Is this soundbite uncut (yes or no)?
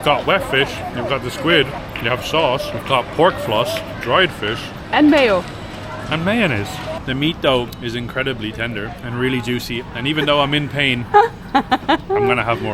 no